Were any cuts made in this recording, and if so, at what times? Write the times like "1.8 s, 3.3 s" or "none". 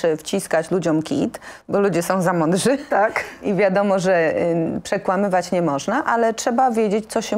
none